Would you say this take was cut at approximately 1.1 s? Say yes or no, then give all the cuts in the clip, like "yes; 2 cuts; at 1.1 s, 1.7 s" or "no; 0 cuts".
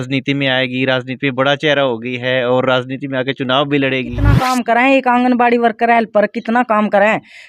no; 1 cut; at 4.4 s